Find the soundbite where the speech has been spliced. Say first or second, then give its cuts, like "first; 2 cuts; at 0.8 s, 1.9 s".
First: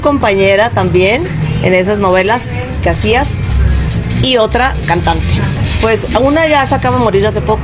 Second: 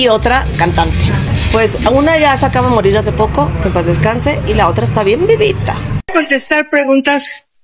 second; 1 cut; at 5.9 s